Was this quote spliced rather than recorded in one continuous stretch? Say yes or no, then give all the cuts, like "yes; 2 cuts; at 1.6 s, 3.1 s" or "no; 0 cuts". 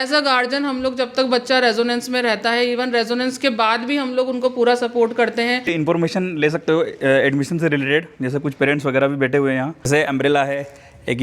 yes; 2 cuts; at 5.7 s, 9.9 s